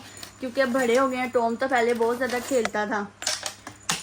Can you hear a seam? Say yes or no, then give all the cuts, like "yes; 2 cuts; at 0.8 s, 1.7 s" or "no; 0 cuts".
no; 0 cuts